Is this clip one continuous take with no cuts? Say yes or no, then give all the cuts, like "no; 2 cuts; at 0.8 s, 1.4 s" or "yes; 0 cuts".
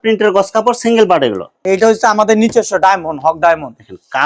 no; 1 cut; at 1.6 s